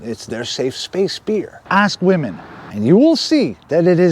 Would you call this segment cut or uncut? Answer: cut